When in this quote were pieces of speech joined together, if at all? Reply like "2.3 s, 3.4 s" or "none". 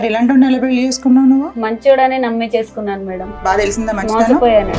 3.2 s